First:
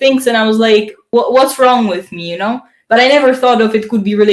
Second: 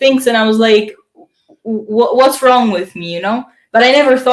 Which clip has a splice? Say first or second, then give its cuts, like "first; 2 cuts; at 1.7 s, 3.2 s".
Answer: first; 1 cut; at 1.0 s